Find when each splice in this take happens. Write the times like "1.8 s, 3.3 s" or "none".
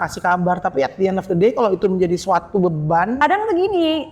3.2 s